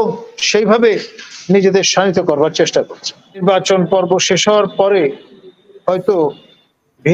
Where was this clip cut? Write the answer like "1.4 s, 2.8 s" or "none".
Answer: 3.4 s